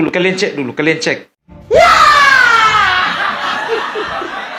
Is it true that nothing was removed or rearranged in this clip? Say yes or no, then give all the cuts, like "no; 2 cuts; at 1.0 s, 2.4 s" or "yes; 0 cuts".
yes; 0 cuts